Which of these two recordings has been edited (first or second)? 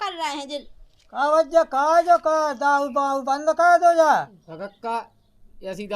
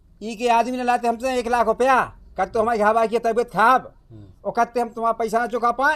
first